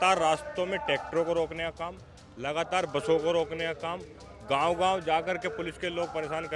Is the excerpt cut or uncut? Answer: uncut